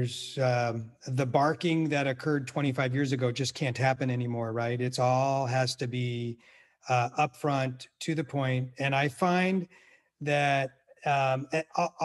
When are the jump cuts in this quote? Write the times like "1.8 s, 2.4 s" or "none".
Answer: none